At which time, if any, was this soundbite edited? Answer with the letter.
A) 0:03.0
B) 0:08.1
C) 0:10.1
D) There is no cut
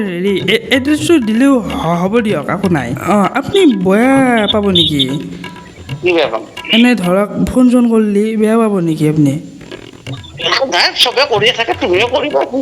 A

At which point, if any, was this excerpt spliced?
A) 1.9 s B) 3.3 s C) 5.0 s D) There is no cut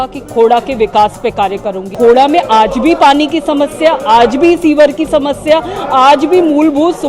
A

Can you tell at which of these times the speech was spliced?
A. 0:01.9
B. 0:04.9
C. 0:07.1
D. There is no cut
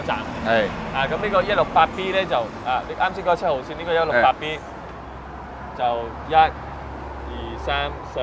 D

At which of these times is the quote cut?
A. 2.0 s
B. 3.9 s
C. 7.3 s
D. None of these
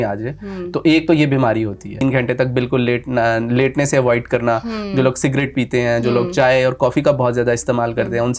A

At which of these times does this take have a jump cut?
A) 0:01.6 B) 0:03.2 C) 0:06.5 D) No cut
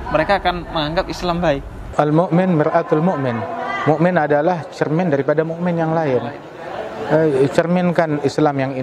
D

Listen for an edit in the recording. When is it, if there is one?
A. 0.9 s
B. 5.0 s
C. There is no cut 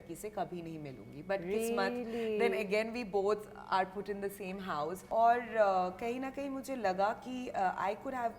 B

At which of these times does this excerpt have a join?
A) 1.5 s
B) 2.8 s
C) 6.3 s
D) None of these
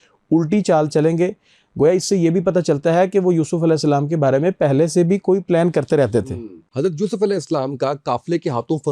C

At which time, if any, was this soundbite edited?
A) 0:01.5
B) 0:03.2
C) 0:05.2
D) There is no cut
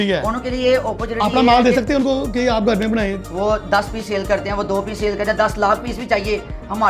B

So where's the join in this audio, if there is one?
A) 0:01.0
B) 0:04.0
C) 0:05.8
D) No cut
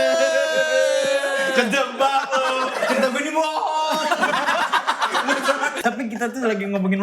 C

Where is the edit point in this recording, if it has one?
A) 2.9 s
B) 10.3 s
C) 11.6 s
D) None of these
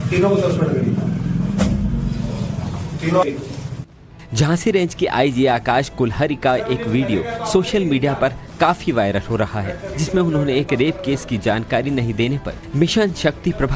C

